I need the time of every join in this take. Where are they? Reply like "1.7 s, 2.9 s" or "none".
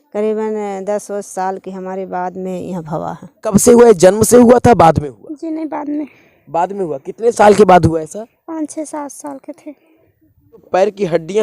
3.5 s, 10.7 s